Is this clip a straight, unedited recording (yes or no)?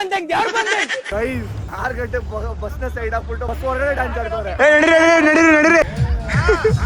no